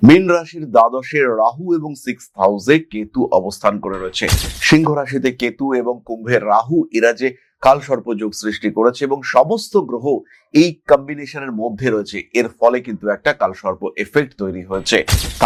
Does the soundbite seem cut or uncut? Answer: uncut